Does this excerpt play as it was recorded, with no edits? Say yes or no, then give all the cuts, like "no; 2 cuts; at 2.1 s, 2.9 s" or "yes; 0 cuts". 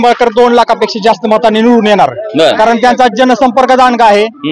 yes; 0 cuts